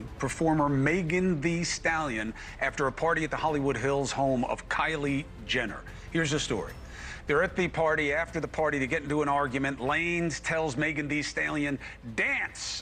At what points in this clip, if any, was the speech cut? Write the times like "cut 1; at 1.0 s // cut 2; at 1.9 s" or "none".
none